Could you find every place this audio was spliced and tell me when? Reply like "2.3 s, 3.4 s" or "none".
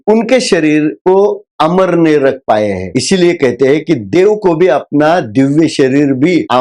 2.8 s